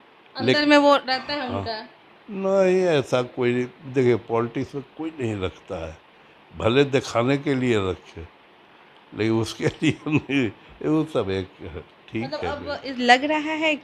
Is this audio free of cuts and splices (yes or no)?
yes